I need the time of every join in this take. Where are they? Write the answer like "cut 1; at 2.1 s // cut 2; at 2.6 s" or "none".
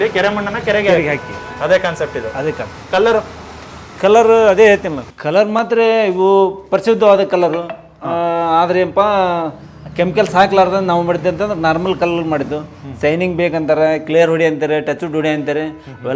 none